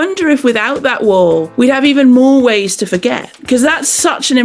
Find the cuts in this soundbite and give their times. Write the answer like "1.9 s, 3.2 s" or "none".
1.5 s